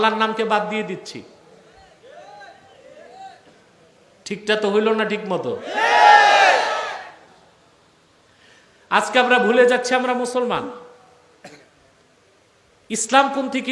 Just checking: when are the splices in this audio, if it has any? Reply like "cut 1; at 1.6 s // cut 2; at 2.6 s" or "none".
none